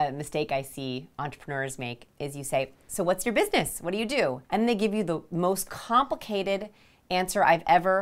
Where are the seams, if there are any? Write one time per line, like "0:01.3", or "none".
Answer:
0:04.4